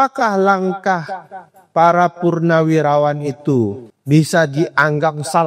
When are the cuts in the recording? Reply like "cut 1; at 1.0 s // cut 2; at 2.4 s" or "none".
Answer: cut 1; at 3.9 s